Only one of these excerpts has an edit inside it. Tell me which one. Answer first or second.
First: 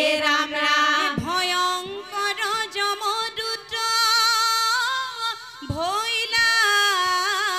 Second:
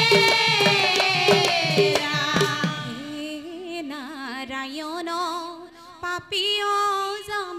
second